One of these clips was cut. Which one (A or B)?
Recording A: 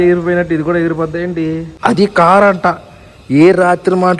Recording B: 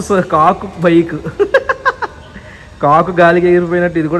A